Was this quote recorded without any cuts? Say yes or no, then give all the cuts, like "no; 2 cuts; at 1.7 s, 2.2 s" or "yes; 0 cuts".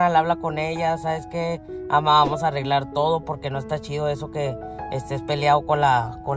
yes; 0 cuts